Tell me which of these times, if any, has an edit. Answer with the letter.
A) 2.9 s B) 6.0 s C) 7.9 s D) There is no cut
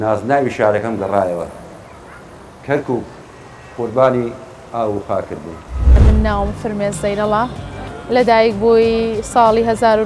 B